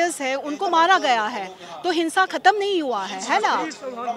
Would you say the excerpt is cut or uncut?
uncut